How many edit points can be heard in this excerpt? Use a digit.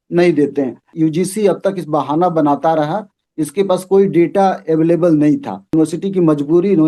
2